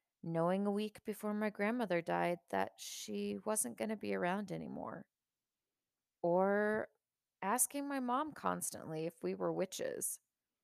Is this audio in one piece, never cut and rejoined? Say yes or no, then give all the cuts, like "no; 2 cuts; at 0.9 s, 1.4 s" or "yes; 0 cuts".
yes; 0 cuts